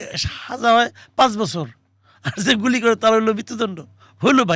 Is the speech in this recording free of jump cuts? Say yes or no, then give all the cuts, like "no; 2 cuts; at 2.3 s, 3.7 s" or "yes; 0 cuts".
yes; 0 cuts